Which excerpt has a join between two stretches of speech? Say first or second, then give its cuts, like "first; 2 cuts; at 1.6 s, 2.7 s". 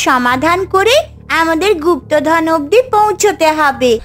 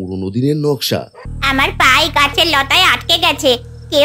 second; 1 cut; at 1.3 s